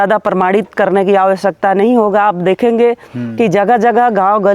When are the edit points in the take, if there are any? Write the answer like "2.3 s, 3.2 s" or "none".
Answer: none

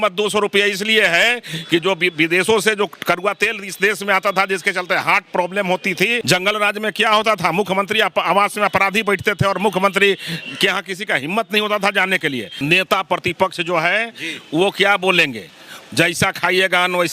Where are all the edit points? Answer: 6.2 s, 12.5 s

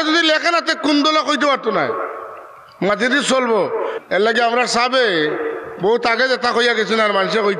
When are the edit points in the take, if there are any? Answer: 4.0 s

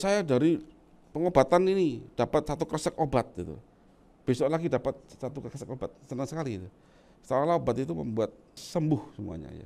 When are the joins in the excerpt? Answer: 8.6 s

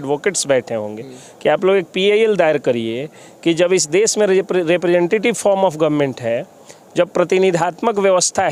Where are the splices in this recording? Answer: none

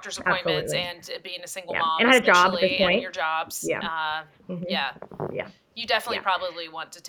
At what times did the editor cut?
none

